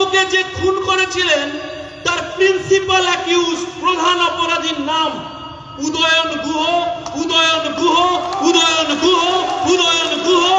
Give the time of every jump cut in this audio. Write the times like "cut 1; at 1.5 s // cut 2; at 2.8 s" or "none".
none